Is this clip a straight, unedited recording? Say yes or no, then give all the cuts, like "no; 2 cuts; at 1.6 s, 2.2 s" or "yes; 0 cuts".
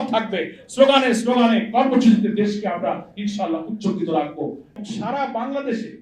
no; 1 cut; at 4.8 s